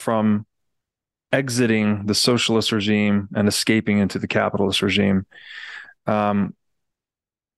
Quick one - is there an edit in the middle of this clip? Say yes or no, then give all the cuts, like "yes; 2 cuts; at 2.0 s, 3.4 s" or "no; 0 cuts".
no; 0 cuts